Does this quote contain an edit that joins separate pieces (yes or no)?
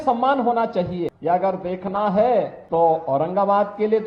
yes